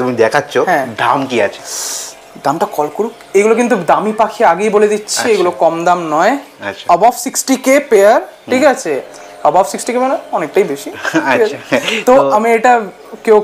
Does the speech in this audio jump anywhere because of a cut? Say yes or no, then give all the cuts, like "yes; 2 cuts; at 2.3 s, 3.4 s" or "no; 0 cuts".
no; 0 cuts